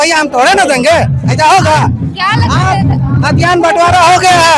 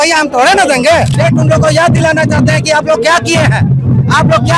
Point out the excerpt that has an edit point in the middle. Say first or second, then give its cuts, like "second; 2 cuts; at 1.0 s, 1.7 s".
second; 1 cut; at 1.1 s